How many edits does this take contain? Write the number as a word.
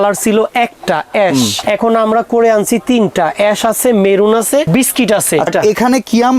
three